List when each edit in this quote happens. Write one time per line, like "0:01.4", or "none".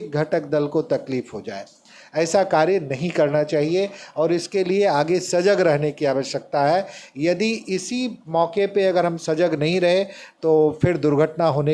none